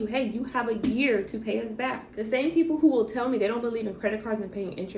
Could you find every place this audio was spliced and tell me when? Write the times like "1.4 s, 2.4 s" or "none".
2.1 s